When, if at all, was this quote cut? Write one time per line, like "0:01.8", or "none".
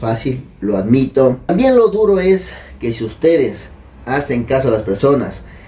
0:01.5